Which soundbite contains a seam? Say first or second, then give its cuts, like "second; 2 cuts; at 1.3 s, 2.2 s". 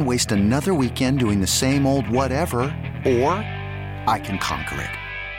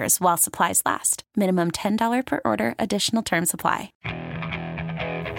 second; 1 cut; at 4.0 s